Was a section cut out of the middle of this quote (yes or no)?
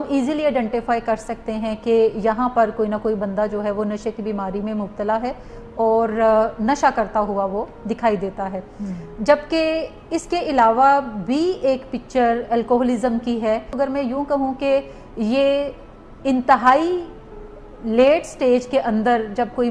yes